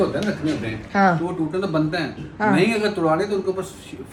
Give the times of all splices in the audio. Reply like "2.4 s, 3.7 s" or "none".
none